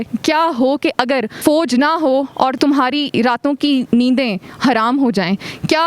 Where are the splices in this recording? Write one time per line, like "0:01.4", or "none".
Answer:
0:01.3